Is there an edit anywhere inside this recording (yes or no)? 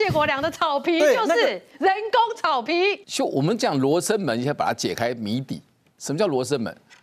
yes